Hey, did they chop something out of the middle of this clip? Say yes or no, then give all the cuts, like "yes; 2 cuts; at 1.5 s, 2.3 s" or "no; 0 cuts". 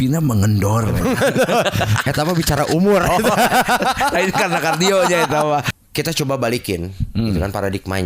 yes; 1 cut; at 5.8 s